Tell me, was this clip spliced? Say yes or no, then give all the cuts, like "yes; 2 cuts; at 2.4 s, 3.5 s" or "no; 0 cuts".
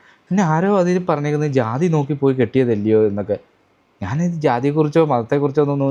no; 0 cuts